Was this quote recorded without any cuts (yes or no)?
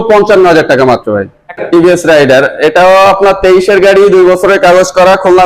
no